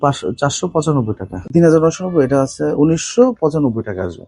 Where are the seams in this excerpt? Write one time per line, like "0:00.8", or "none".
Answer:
0:01.4